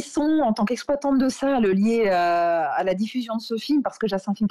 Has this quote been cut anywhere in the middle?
no; 0 cuts

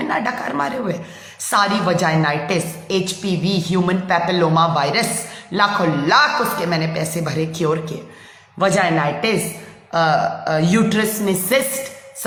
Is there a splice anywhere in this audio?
no; 0 cuts

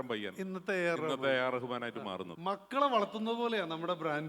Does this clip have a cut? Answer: yes; 1 cut; at 2.3 s

